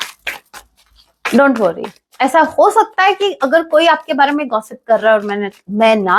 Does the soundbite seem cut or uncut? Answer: uncut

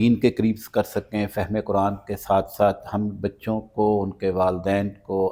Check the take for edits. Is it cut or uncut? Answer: uncut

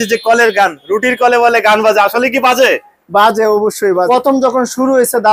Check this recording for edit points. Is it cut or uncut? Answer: cut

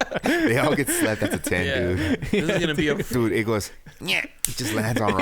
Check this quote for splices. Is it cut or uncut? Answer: cut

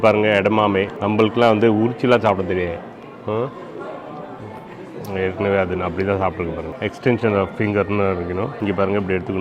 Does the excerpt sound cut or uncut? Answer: cut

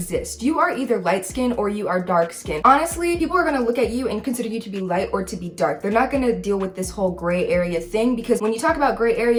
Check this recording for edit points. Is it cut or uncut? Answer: uncut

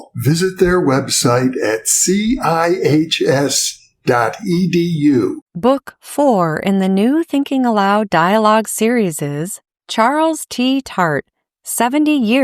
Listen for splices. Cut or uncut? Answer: cut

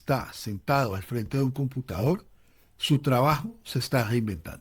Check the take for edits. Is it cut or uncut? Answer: uncut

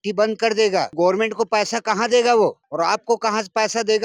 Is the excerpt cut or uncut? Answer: cut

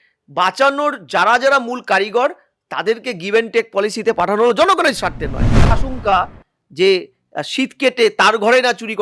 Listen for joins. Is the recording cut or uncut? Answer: cut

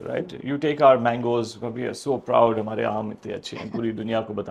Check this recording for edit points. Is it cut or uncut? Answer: uncut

